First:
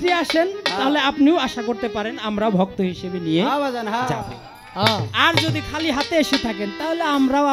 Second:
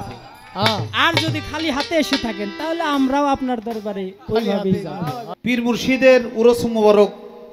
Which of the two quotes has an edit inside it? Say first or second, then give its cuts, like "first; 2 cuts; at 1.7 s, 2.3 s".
second; 1 cut; at 5.2 s